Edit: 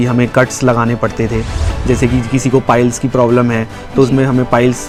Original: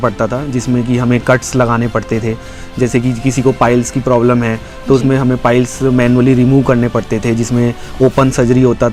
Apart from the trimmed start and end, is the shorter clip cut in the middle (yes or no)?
no